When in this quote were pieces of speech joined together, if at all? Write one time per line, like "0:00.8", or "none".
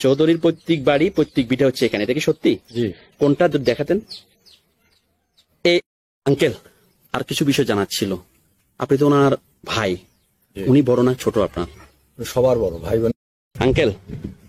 0:05.9
0:13.1